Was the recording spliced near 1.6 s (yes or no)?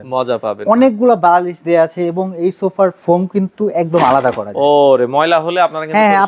no